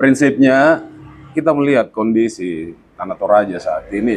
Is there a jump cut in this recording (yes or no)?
yes